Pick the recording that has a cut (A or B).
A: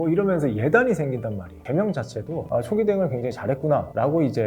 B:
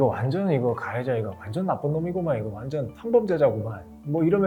A